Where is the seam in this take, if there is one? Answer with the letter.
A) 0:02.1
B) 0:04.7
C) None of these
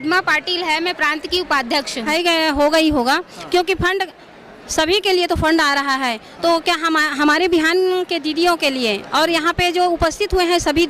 A